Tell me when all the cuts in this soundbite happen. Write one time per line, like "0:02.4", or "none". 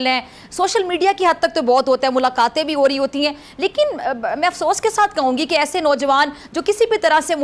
none